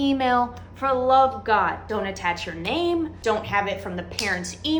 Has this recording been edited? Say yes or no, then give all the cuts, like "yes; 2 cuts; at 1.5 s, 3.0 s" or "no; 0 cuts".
no; 0 cuts